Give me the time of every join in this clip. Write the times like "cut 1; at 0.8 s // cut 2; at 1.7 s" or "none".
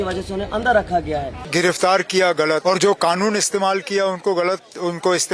cut 1; at 1.4 s // cut 2; at 2.6 s

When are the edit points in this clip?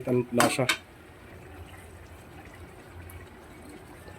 cut 1; at 1.3 s

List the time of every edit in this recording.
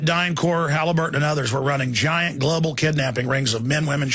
cut 1; at 2.0 s

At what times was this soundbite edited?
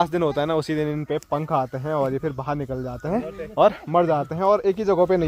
none

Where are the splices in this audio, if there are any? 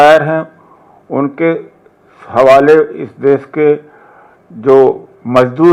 none

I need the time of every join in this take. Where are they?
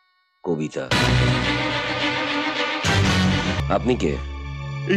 cut 1; at 3.6 s

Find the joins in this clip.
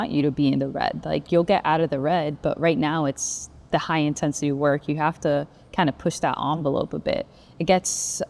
none

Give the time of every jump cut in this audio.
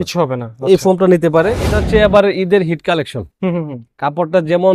cut 1; at 1.7 s

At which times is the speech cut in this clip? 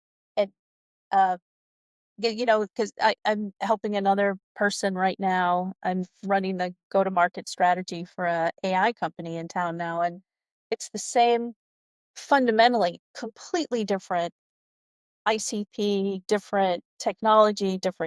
cut 1; at 15.2 s // cut 2; at 16.9 s

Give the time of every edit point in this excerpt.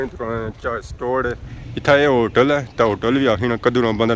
cut 1; at 1.4 s

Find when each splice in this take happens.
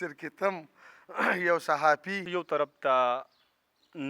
cut 1; at 2.6 s

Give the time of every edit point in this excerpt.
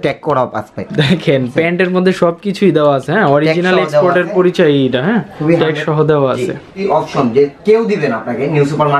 cut 1; at 6.8 s

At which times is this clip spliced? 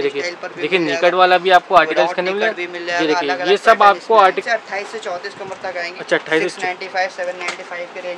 cut 1; at 4.4 s

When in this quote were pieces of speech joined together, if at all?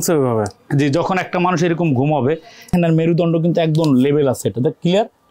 cut 1; at 2.7 s

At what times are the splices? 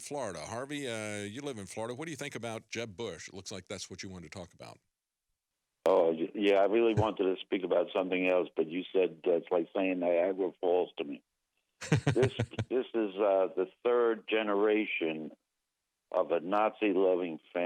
none

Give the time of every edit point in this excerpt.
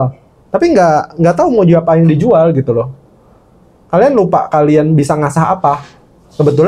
none

